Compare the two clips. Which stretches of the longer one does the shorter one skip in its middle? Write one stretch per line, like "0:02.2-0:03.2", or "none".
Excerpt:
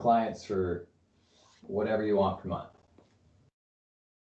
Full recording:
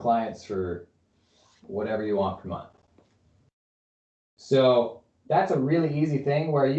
none